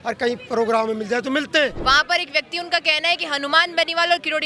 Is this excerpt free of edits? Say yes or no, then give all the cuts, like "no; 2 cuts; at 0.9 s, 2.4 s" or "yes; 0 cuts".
no; 1 cut; at 1.8 s